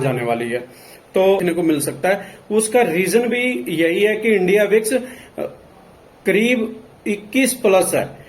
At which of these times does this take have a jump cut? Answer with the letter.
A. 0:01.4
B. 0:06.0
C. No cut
A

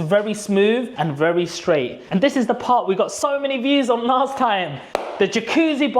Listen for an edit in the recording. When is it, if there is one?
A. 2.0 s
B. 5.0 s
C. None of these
A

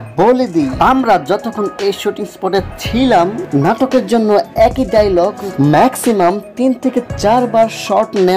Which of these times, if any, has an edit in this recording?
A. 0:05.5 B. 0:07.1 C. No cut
C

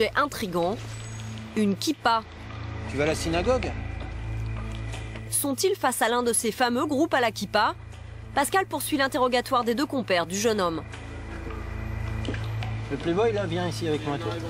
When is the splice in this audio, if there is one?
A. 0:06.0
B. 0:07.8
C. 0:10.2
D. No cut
A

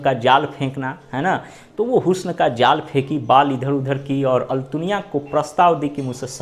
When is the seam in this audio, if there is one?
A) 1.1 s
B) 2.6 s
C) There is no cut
C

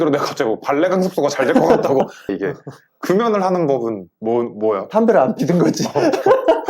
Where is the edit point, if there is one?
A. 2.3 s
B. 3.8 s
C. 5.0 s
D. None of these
A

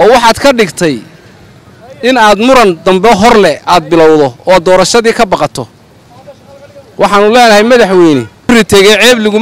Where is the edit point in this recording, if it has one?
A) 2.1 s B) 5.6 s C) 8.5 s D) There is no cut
C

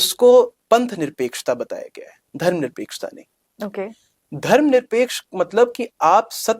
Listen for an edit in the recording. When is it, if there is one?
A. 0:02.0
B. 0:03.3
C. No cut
C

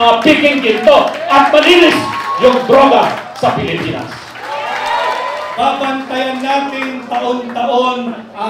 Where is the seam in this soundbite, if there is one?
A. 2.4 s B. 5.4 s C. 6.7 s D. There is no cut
B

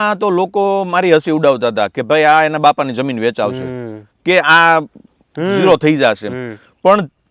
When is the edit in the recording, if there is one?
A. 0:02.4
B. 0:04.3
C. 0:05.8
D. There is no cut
D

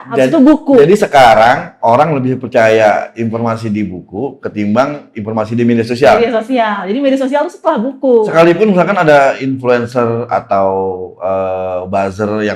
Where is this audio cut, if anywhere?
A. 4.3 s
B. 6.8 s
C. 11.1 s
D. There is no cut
D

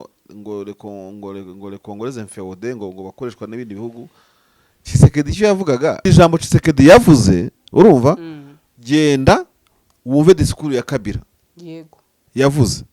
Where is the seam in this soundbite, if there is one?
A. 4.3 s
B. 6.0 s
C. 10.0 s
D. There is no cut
B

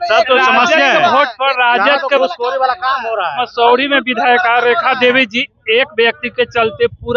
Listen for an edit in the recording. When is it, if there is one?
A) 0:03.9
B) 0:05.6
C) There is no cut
C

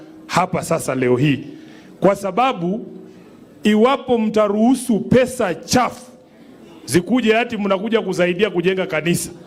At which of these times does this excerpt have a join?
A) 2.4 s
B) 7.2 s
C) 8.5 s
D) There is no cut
D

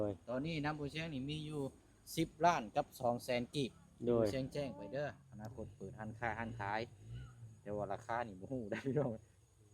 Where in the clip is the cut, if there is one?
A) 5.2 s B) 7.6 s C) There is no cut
A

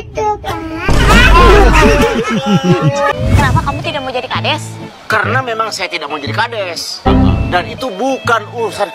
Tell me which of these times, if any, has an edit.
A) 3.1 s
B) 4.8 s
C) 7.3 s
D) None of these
A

